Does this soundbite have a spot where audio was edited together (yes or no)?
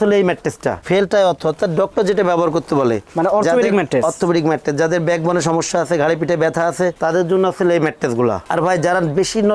yes